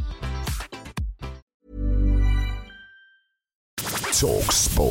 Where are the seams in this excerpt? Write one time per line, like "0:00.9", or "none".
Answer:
0:01.4
0:03.7